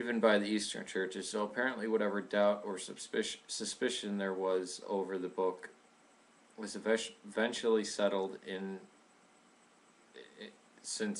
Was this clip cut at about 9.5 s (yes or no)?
no